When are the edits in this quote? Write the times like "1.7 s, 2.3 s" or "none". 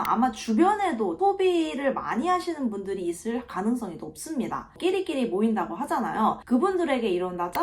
1.1 s, 6.4 s